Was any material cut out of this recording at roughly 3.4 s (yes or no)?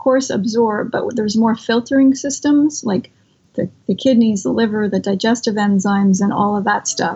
yes